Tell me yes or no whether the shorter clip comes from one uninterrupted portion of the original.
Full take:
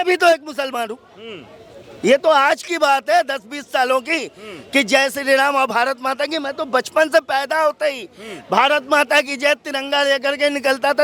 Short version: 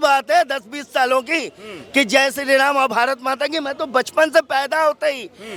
yes